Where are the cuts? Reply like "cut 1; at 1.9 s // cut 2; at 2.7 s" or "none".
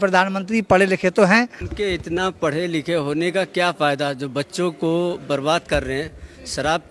cut 1; at 1.6 s